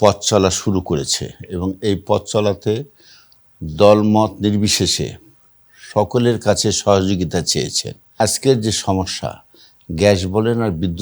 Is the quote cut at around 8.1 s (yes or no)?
yes